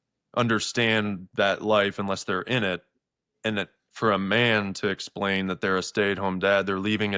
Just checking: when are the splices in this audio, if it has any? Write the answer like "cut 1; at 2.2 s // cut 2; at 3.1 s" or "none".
none

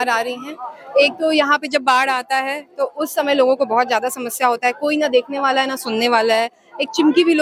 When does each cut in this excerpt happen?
none

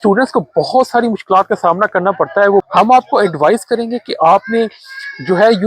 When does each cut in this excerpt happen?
cut 1; at 2.7 s

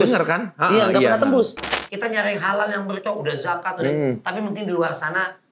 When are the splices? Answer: cut 1; at 1.9 s

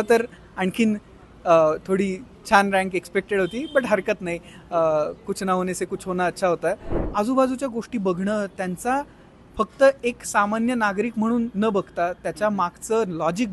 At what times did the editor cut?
cut 1; at 7.0 s

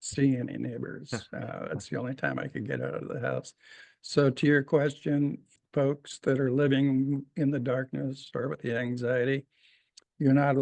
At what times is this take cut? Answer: none

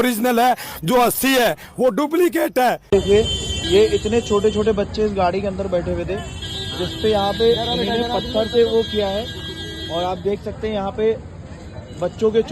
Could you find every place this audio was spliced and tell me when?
cut 1; at 2.8 s

